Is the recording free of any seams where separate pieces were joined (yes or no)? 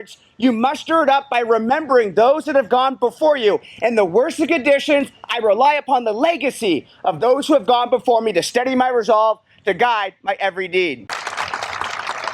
no